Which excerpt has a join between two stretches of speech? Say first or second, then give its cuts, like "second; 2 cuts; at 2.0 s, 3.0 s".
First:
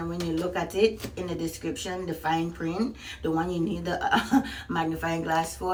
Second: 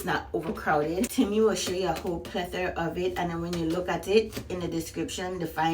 second; 1 cut; at 1.1 s